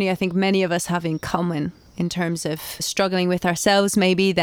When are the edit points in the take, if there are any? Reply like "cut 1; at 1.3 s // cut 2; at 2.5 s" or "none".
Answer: cut 1; at 2.9 s